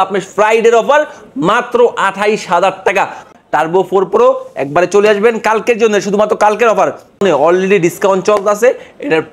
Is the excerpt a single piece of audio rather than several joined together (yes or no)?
no